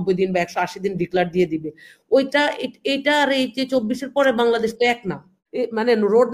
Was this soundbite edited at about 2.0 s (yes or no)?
no